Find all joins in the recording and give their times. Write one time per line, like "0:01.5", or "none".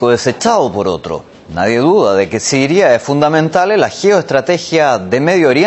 0:02.8